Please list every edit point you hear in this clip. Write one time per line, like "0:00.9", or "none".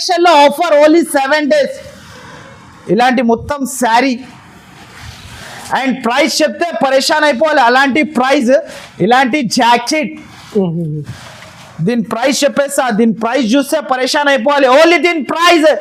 none